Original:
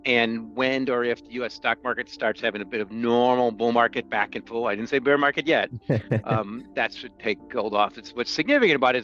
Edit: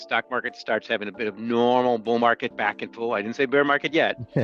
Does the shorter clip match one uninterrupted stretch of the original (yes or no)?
yes